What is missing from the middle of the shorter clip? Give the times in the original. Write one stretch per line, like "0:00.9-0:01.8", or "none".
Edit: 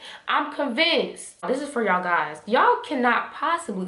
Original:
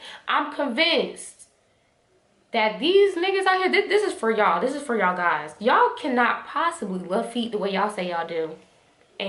0:01.5-0:04.6

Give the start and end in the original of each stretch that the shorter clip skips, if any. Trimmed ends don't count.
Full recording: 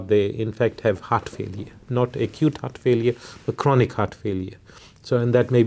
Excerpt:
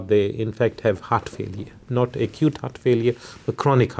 none

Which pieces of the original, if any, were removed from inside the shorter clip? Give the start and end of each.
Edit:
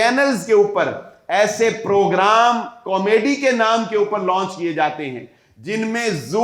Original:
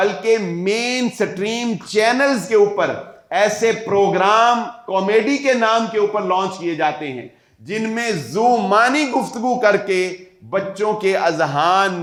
none

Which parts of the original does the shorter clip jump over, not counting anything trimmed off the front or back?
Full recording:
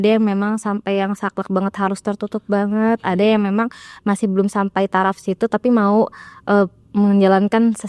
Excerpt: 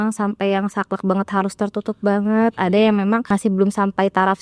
0:03.7-0:04.0

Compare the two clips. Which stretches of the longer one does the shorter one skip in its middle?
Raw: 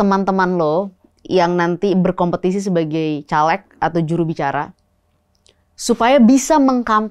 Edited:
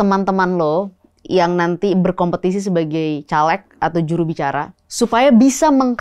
0:04.8-0:05.7

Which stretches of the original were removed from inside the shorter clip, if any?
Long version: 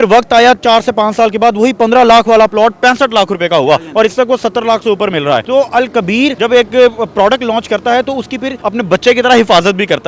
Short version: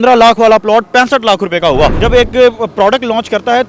0:03.9-0:06.4

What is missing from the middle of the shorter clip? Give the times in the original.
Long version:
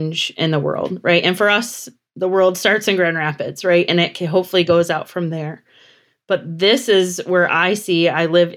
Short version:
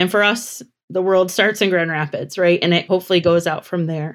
0:04.1-0:04.3

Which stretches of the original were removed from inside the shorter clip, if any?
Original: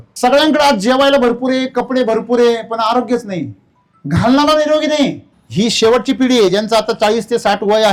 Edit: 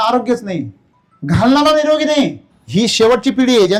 none

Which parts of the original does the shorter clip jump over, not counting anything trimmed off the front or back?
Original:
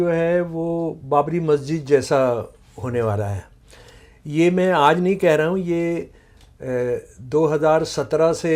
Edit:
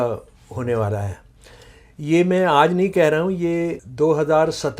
0:06.1-0:07.2

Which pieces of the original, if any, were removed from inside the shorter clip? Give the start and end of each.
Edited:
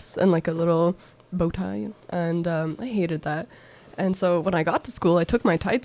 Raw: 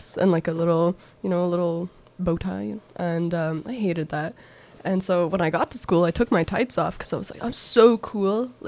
0:01.1-0:02.0

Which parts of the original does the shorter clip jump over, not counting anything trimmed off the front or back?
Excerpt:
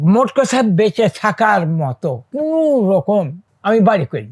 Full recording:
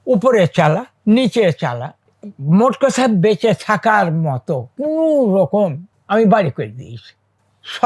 none

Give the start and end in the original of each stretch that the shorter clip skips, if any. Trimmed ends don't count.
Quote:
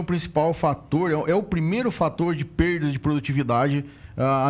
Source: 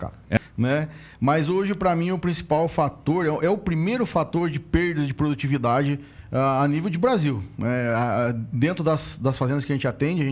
none

